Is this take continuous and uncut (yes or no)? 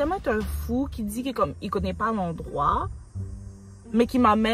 yes